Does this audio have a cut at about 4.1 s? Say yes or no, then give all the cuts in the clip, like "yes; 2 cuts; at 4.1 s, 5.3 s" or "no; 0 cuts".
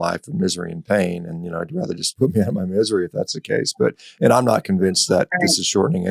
no; 1 cut; at 2.1 s